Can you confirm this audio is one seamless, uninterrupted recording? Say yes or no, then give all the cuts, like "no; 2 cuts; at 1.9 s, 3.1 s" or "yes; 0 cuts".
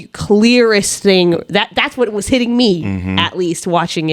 yes; 0 cuts